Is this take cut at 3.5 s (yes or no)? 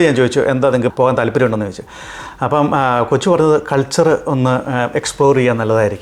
no